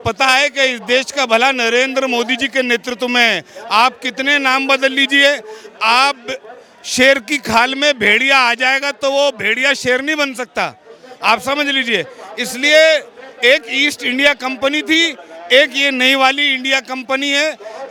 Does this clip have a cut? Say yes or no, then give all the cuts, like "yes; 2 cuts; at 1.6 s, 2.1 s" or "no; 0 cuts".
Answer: no; 0 cuts